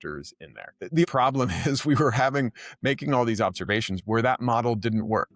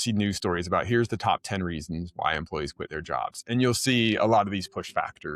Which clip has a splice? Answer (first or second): first